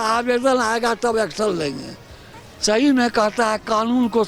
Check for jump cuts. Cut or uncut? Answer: uncut